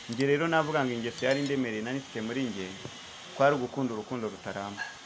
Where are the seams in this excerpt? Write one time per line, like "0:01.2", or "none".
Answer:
none